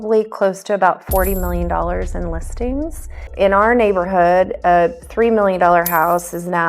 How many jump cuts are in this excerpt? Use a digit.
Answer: 1